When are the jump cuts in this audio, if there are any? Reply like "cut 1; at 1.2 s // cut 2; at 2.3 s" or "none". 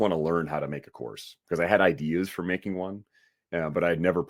none